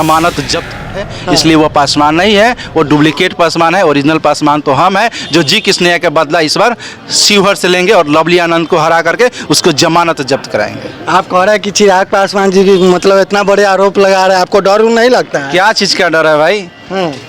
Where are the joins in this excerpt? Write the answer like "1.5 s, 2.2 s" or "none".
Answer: 0.9 s